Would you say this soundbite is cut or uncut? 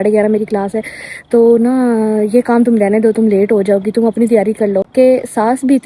cut